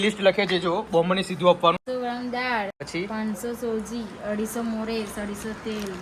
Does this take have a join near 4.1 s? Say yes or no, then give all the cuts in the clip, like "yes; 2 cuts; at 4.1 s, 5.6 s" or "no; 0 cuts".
no; 2 cuts; at 1.8 s, 2.8 s